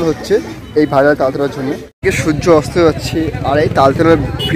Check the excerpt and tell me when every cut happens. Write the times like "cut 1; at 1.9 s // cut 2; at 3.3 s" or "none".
cut 1; at 1.8 s